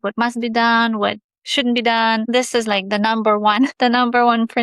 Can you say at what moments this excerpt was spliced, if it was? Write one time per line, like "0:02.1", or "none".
0:02.3
0:03.7